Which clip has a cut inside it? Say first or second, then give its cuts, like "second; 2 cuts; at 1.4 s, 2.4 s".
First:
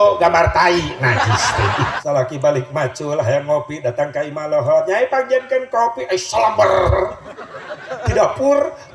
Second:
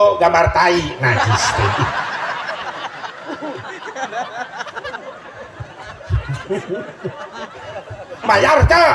first; 1 cut; at 2.0 s